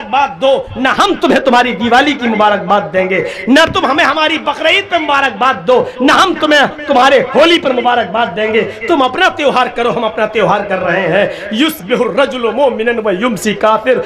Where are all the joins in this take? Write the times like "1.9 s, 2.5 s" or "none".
none